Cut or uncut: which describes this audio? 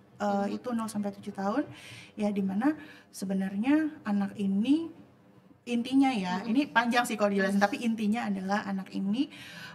uncut